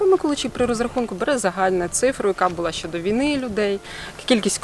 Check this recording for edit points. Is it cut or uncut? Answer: uncut